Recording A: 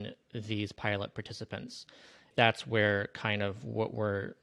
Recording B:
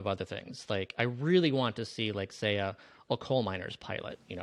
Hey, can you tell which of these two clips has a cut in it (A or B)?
A